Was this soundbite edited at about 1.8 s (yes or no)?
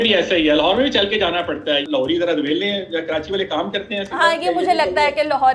yes